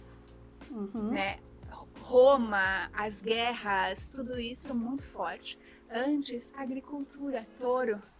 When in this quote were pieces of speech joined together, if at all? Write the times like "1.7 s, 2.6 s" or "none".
none